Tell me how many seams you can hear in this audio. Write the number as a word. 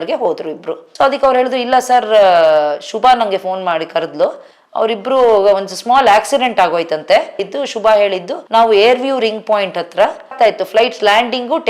three